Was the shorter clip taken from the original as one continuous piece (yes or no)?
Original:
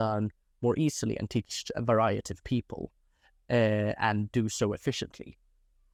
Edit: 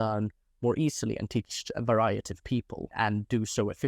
no